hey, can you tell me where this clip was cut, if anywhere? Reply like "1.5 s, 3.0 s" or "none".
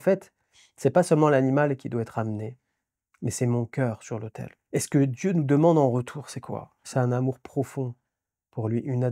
4.6 s